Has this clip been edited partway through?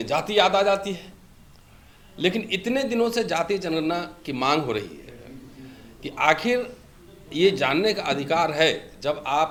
no; 0 cuts

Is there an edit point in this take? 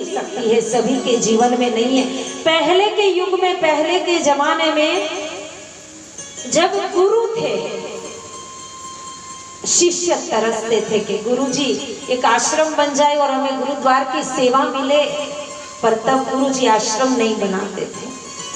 no; 0 cuts

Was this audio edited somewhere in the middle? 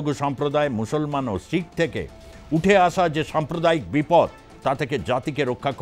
no; 0 cuts

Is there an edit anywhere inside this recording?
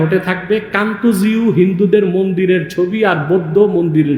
no; 0 cuts

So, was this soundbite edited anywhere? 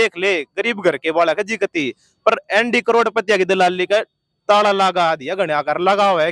no; 0 cuts

